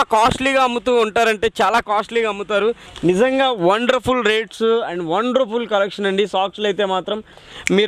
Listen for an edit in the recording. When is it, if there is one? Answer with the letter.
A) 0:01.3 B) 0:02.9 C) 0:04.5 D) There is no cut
B